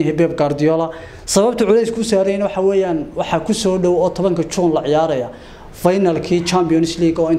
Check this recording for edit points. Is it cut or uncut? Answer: uncut